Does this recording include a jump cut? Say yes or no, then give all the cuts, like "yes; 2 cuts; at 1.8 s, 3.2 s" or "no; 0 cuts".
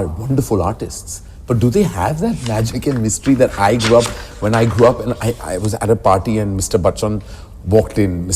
no; 0 cuts